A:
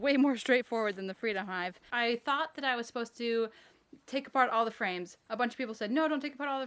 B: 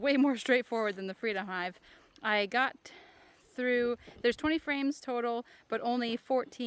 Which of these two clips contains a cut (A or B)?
A